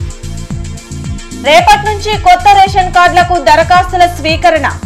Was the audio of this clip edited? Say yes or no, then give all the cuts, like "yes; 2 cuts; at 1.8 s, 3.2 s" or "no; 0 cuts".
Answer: yes; 1 cut; at 1.1 s